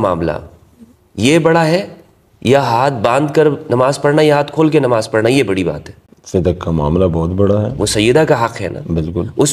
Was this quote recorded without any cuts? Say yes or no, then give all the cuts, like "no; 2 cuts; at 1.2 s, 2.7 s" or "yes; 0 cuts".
yes; 0 cuts